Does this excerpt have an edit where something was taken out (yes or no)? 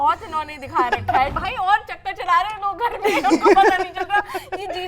yes